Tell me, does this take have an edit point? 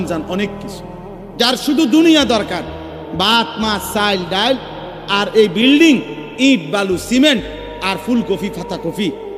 no; 0 cuts

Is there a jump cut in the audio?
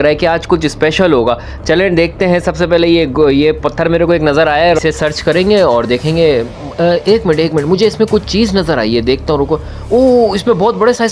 no; 0 cuts

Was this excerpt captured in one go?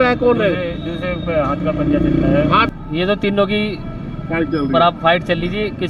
no; 1 cut; at 2.7 s

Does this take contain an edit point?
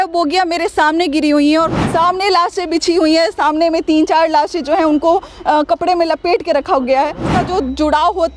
yes; 2 cuts; at 1.8 s, 7.3 s

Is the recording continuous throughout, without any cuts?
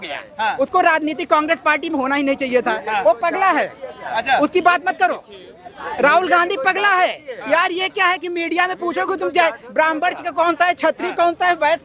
yes; 0 cuts

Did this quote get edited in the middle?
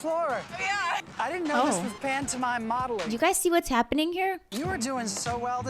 yes; 2 cuts; at 3.1 s, 4.5 s

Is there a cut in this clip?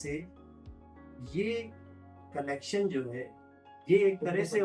no; 0 cuts

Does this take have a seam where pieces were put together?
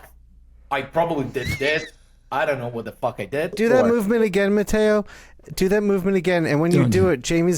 yes; 1 cut; at 3.5 s

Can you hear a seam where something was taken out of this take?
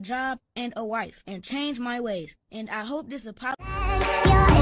yes; 1 cut; at 3.6 s

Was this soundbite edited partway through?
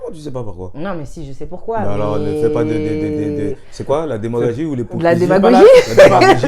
no; 0 cuts

